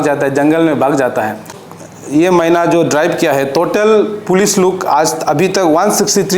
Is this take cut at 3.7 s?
no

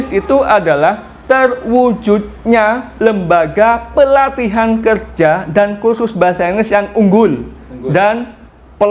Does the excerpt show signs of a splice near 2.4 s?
no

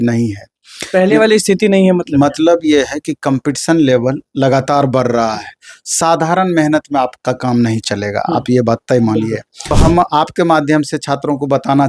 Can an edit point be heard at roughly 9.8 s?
yes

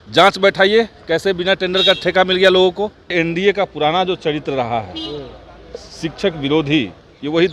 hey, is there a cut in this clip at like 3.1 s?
yes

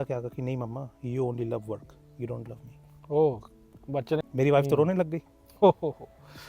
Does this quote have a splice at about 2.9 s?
no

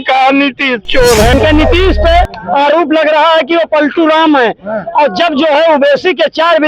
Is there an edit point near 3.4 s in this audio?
no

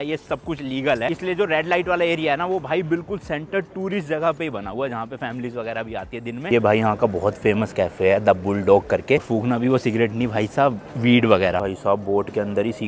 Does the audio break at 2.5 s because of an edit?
no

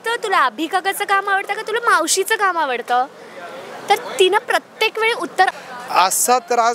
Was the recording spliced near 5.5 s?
yes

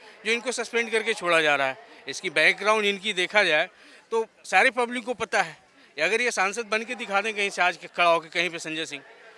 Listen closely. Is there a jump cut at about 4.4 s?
no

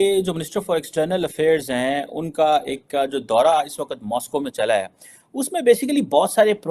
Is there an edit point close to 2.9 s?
no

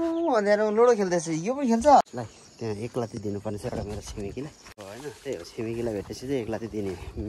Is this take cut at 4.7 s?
yes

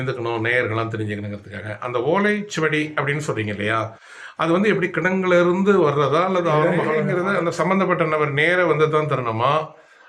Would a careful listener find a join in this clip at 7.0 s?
yes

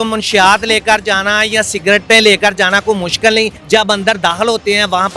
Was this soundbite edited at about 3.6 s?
yes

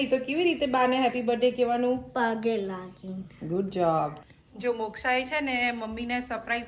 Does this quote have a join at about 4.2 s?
yes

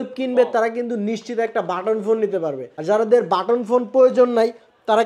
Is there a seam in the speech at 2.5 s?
no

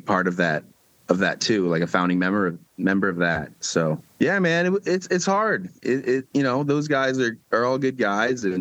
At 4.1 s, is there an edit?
yes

